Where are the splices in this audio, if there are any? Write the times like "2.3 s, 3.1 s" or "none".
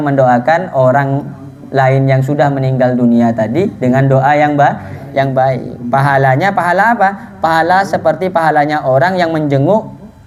none